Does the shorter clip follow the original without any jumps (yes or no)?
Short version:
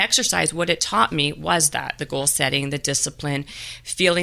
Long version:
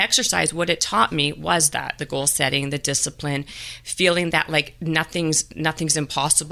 yes